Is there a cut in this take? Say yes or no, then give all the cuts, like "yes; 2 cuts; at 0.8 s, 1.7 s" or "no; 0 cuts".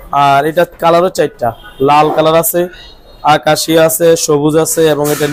no; 0 cuts